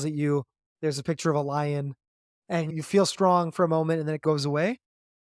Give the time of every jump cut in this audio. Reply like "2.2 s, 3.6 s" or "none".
2.7 s, 4.2 s